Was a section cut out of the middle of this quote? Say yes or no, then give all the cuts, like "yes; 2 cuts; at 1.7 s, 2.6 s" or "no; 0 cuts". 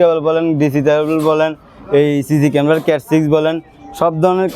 no; 0 cuts